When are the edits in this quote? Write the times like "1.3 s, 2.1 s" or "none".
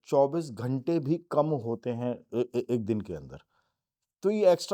none